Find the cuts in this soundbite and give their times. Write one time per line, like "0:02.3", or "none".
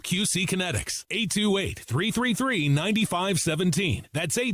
none